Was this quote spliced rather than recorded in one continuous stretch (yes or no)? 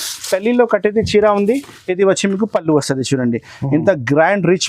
no